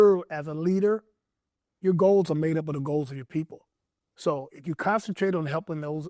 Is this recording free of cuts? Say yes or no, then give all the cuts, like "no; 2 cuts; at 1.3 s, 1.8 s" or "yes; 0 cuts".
yes; 0 cuts